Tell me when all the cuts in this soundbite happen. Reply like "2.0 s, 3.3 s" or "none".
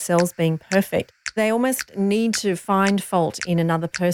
1.4 s

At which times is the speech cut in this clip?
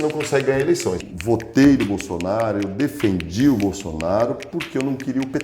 1.1 s

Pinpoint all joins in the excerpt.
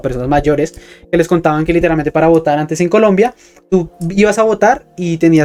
none

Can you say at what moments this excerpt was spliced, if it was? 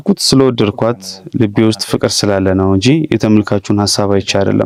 none

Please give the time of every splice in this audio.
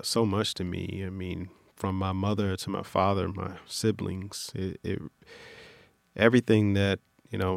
none

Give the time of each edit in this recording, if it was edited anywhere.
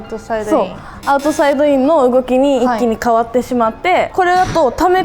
4.1 s

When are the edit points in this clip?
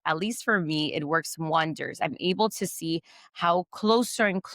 none

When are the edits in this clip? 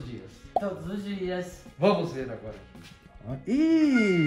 3.0 s

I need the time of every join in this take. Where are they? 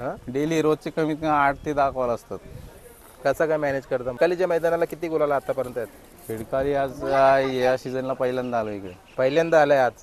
4.2 s

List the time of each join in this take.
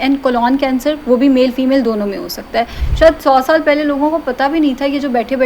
2.8 s

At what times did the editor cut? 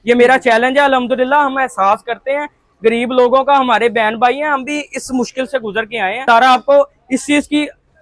6.2 s

